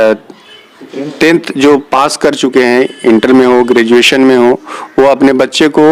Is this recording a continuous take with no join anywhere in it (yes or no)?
yes